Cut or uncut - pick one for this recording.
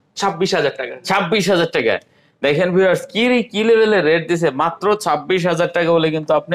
uncut